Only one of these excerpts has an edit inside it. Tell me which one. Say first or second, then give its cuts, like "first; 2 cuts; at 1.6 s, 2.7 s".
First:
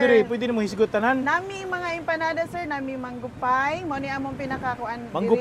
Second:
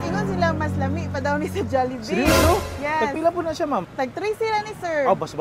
second; 1 cut; at 3.9 s